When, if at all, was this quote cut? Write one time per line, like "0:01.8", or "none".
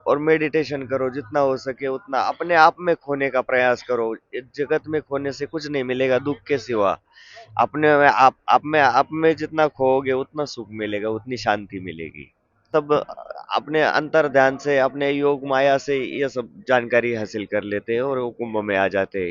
0:12.7